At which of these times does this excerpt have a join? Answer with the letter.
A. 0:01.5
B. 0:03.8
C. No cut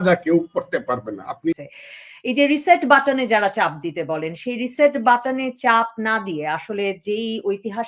A